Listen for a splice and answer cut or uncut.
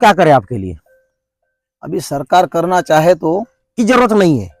uncut